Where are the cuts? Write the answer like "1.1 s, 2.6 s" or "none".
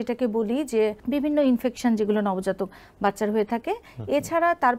1.0 s